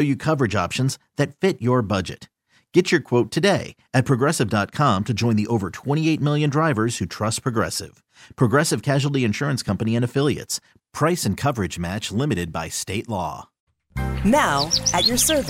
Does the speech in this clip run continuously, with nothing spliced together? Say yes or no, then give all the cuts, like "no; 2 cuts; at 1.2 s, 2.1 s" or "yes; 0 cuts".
no; 1 cut; at 13.8 s